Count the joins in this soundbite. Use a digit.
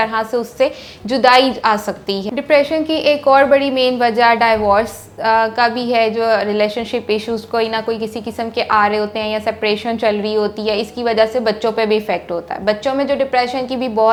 0